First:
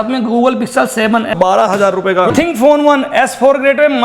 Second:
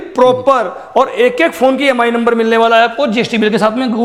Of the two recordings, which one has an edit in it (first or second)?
first